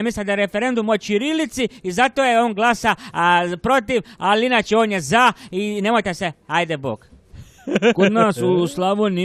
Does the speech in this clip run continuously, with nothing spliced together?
yes; 0 cuts

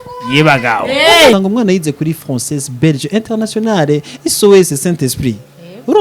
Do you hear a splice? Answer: yes; 1 cut; at 1.3 s

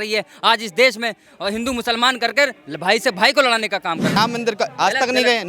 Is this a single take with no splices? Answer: no; 1 cut; at 4.2 s

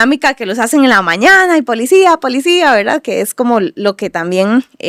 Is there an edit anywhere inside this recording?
no; 0 cuts

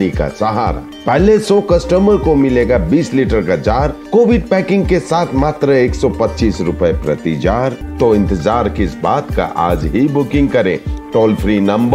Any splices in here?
yes; 1 cut; at 7.8 s

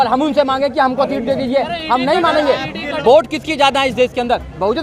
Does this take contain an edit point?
yes; 1 cut; at 2.9 s

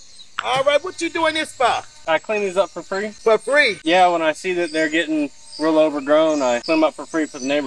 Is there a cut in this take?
yes; 4 cuts; at 1.9 s, 3.1 s, 3.8 s, 6.6 s

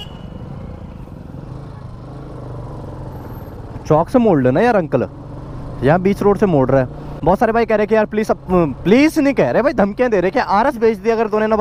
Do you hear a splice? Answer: no; 0 cuts

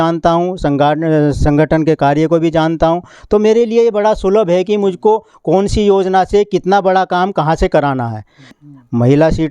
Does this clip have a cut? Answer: yes; 1 cut; at 8.5 s

